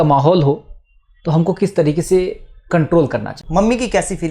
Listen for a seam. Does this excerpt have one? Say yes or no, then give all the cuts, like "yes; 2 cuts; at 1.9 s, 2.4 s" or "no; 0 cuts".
yes; 1 cut; at 3.4 s